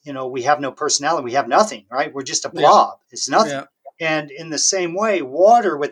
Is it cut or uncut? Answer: uncut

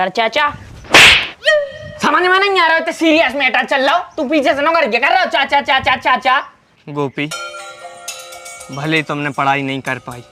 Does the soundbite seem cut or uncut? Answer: cut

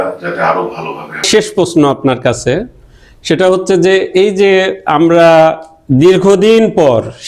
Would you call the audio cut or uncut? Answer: uncut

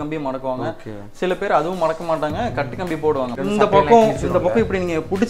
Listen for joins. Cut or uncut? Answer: cut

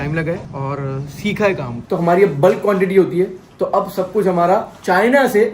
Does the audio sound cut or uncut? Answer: cut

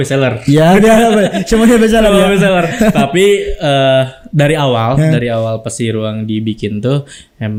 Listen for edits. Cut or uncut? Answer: uncut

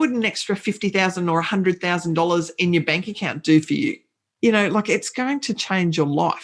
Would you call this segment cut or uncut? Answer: uncut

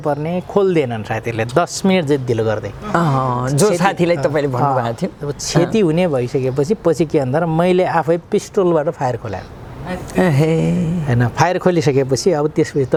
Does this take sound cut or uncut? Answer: uncut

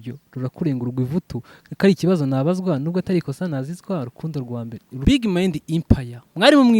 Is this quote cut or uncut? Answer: cut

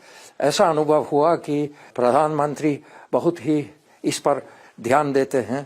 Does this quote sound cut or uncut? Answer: cut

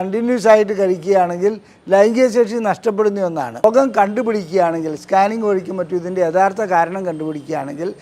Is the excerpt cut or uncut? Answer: cut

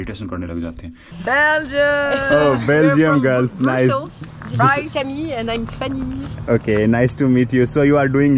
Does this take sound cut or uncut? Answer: cut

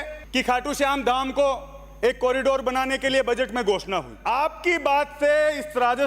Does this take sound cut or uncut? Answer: cut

